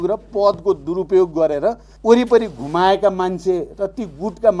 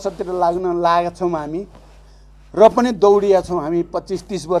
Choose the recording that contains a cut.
first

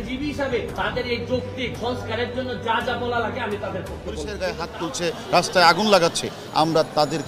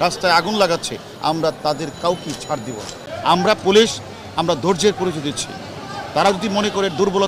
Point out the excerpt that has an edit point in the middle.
first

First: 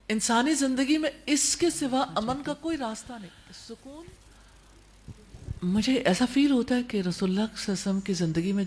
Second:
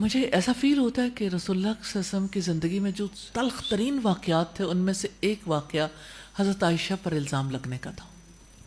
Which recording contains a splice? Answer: first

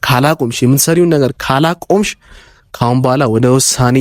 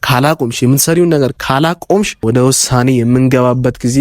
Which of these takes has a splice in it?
second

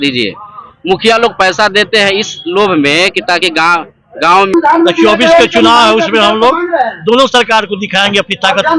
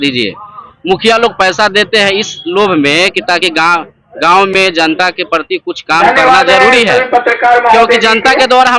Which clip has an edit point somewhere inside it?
first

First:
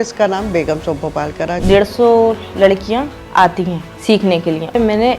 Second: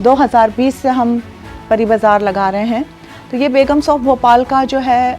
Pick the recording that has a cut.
first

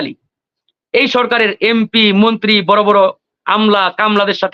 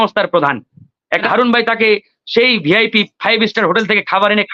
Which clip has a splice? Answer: second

